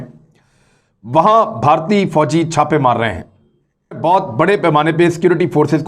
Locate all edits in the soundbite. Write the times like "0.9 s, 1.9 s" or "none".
4.0 s